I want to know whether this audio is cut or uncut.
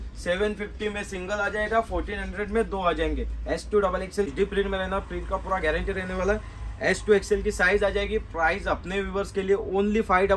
cut